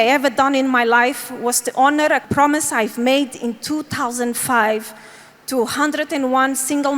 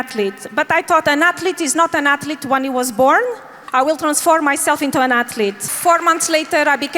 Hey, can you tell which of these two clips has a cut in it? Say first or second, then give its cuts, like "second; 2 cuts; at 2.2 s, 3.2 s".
second; 2 cuts; at 3.5 s, 5.7 s